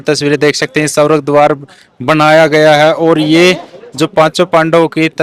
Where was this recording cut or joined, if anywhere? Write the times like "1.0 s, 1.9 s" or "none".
none